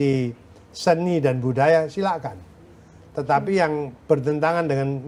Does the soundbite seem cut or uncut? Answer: uncut